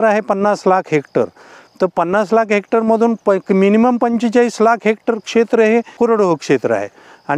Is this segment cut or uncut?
cut